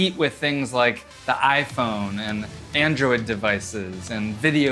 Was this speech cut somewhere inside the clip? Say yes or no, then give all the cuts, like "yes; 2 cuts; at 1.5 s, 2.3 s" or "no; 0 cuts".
no; 0 cuts